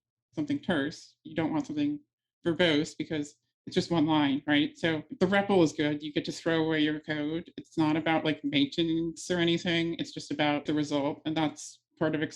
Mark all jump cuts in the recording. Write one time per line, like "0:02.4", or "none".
0:05.1
0:10.6